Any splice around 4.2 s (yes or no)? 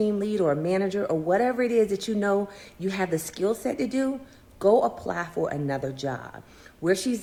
no